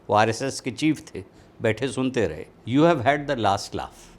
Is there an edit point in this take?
yes; 1 cut; at 2.5 s

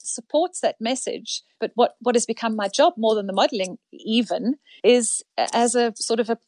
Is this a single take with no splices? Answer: yes; 0 cuts

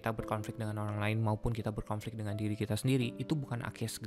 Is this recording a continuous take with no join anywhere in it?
yes; 0 cuts

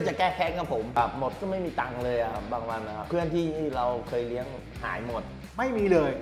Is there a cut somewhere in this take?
yes; 1 cut; at 1.0 s

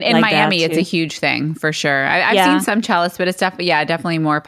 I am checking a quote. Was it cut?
no; 0 cuts

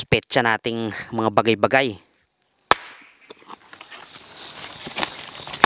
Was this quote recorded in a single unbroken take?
yes; 0 cuts

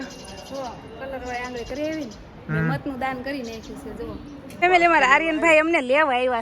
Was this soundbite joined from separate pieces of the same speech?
yes; 1 cut; at 4.6 s

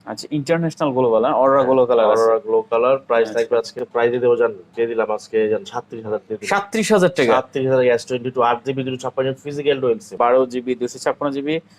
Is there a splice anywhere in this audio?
yes; 2 cuts; at 3.8 s, 10.1 s

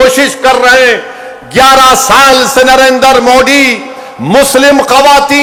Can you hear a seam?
no; 0 cuts

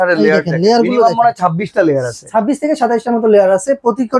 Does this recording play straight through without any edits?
yes; 0 cuts

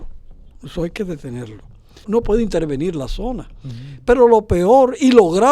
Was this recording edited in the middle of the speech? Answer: yes; 1 cut; at 2.0 s

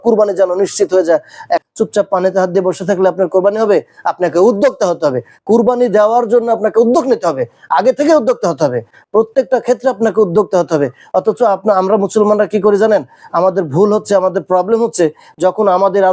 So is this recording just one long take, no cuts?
no; 1 cut; at 1.6 s

